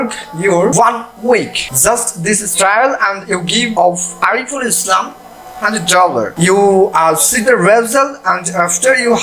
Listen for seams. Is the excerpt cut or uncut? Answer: cut